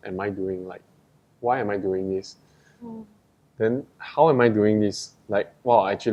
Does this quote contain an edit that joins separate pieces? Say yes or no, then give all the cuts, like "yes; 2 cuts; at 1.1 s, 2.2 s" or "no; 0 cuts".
no; 0 cuts